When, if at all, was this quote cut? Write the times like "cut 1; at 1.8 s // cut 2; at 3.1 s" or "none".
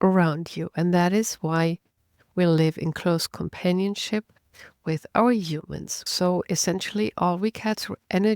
cut 1; at 5.9 s

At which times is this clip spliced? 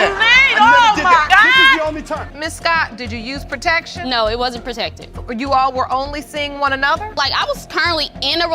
cut 1; at 2.3 s

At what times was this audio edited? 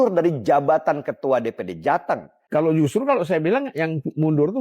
cut 1; at 2.3 s

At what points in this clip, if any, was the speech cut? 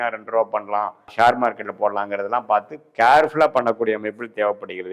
cut 1; at 1.1 s

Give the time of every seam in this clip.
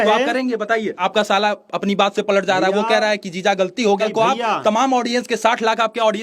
cut 1; at 1.0 s // cut 2; at 4.0 s

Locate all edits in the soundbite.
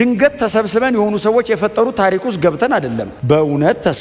cut 1; at 3.1 s

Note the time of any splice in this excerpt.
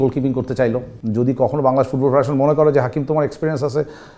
cut 1; at 0.9 s

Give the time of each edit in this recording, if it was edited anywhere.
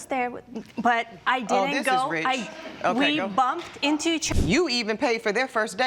cut 1; at 4.2 s

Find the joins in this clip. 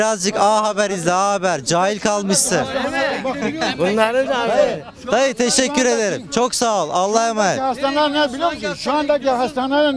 none

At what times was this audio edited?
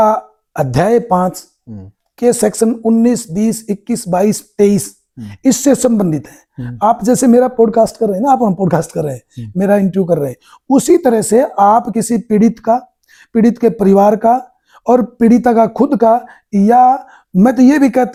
none

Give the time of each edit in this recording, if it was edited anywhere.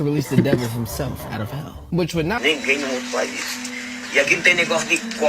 cut 1; at 2.4 s

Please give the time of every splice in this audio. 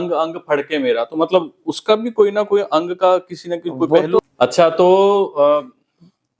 cut 1; at 4.2 s

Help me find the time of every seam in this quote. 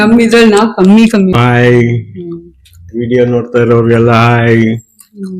cut 1; at 1.4 s

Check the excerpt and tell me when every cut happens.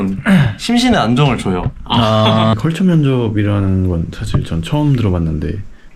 cut 1; at 2.5 s

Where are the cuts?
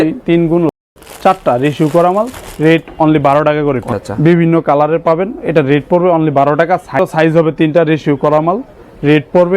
cut 1; at 0.9 s // cut 2; at 3.9 s // cut 3; at 7.0 s

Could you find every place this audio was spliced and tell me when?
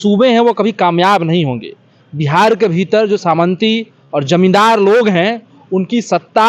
none

